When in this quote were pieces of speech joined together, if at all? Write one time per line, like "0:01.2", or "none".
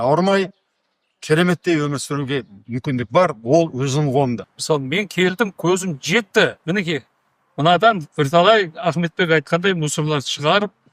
0:04.4
0:06.6